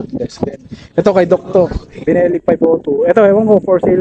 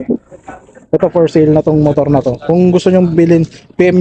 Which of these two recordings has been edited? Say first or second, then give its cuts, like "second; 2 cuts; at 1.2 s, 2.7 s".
first; 1 cut; at 1.9 s